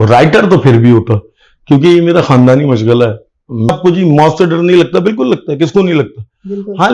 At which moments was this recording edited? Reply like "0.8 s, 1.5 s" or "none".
3.7 s